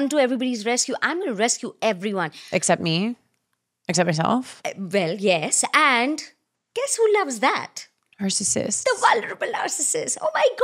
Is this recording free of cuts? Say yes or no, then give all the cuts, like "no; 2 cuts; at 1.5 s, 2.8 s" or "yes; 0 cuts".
yes; 0 cuts